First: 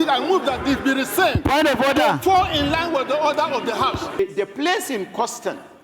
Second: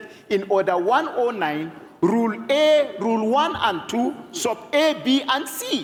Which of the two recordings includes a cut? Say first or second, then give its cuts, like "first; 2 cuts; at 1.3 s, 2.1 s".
first; 1 cut; at 4.2 s